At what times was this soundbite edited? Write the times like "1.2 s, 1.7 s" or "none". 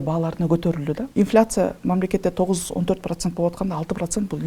1.0 s